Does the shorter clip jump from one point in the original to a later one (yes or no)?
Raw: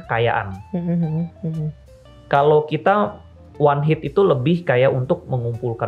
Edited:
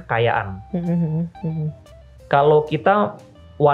no